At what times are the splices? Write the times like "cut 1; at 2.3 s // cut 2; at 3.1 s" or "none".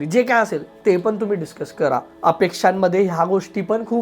cut 1; at 2.1 s